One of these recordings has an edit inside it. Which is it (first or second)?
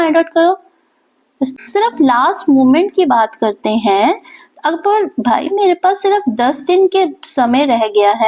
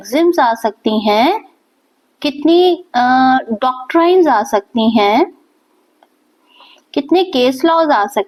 first